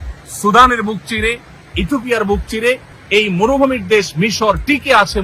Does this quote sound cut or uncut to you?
cut